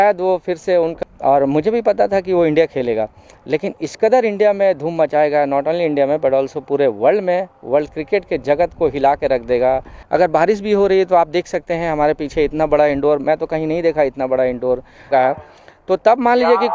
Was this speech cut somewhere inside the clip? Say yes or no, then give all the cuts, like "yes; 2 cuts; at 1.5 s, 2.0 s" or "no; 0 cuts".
yes; 3 cuts; at 0.9 s, 9.9 s, 15.1 s